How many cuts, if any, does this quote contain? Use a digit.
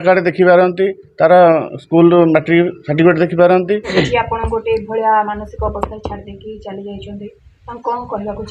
1